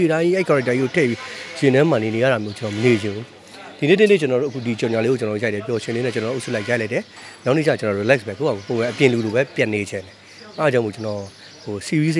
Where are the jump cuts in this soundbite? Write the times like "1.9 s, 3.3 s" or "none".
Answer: none